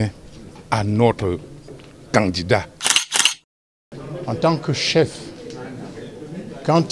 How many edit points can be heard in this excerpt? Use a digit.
1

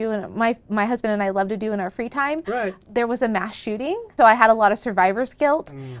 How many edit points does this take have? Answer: 1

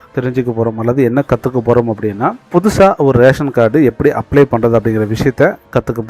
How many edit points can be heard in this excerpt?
1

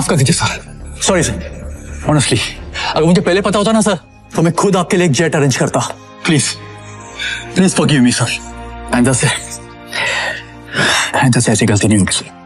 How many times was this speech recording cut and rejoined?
0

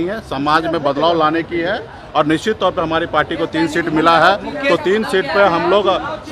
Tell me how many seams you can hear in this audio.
0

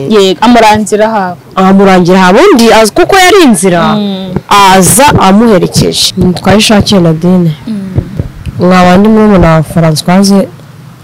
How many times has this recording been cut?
1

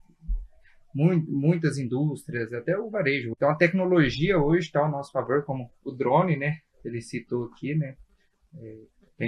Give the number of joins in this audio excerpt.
1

